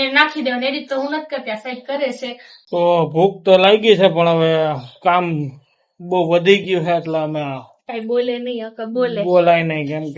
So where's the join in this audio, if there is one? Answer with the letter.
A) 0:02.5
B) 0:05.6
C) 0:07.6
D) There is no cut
A